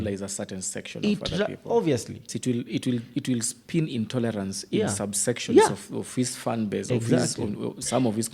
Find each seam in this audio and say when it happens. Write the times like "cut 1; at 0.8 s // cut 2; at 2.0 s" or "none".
cut 1; at 2.3 s